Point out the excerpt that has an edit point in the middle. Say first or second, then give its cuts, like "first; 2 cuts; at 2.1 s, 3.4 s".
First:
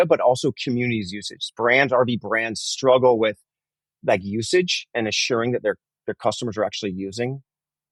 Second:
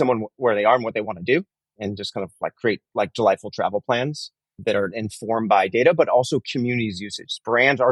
second; 2 cuts; at 1.7 s, 4.5 s